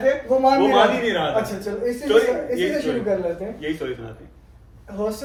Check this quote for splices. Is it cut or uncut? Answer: uncut